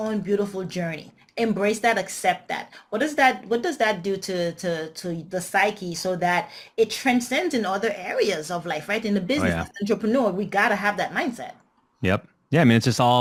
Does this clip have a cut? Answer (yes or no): no